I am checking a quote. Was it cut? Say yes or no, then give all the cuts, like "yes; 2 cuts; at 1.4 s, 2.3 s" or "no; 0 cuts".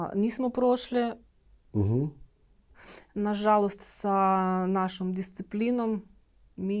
no; 0 cuts